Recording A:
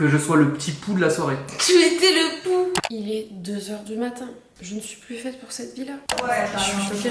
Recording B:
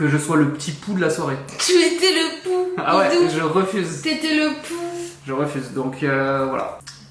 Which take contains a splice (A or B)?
A